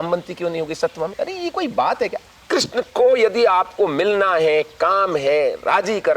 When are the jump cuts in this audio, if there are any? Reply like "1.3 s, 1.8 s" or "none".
2.3 s

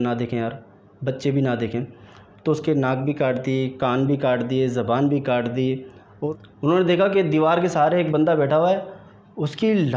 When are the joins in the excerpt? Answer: 6.1 s

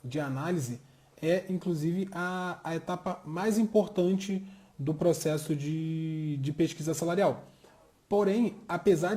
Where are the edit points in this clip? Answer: none

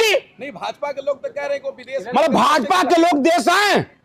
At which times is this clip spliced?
none

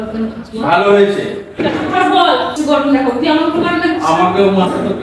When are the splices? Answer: 2.5 s

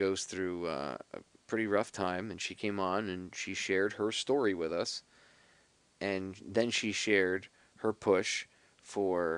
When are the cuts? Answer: 7.0 s

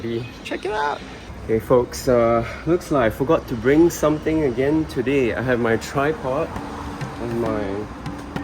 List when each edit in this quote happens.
1.1 s

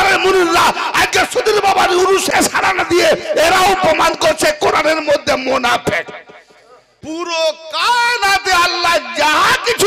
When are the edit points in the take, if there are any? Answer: 2.2 s, 6.9 s

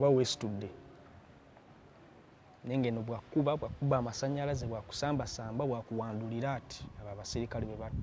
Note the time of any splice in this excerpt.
none

